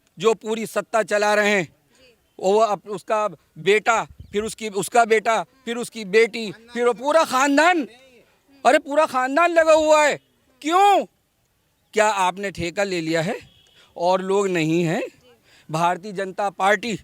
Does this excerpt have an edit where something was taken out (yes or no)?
no